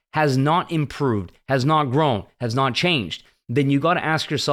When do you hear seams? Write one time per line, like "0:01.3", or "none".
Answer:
none